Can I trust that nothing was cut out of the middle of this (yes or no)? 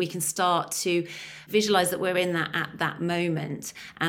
no